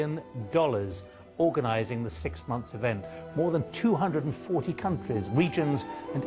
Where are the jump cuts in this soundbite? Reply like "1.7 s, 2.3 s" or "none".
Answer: 2.7 s